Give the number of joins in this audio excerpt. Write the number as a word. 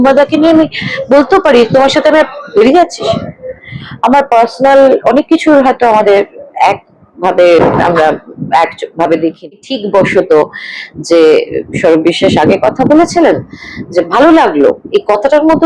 one